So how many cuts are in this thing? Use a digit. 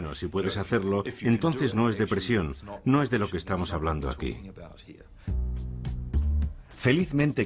1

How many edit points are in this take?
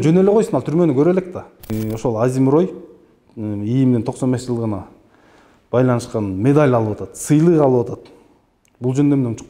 1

